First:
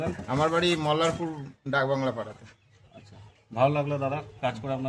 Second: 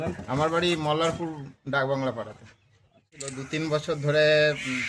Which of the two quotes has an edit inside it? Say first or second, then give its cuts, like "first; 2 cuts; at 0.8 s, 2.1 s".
second; 1 cut; at 3.4 s